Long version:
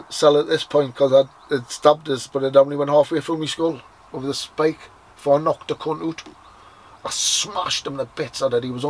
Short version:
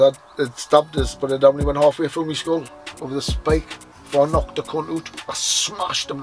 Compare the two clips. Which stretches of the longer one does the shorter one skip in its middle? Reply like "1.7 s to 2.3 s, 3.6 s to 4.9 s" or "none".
6.3 s to 6.9 s